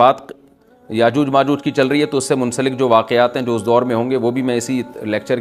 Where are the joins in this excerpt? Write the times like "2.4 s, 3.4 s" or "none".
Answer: none